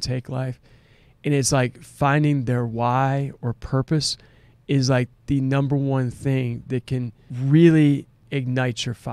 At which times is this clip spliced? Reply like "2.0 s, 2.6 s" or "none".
7.2 s, 8.2 s